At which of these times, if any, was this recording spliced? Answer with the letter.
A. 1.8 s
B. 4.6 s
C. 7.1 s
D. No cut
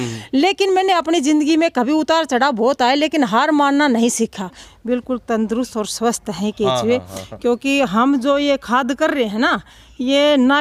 B